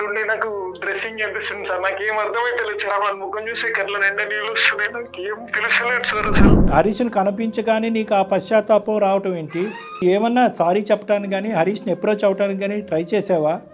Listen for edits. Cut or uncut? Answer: cut